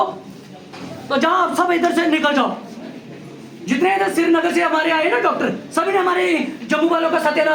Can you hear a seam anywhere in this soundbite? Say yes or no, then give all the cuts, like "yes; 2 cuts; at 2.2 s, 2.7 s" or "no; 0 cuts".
no; 0 cuts